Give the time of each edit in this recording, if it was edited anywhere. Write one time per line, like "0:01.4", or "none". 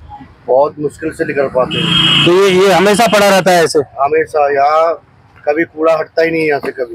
none